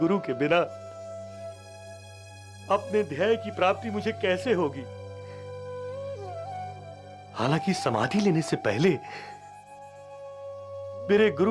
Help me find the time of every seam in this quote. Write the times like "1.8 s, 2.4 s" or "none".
none